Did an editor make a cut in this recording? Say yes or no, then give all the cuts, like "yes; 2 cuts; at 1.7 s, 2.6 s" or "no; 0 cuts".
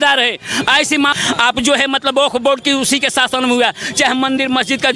yes; 1 cut; at 1.1 s